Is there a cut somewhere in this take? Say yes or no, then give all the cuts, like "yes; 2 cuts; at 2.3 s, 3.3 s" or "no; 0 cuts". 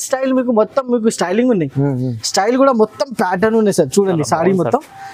no; 0 cuts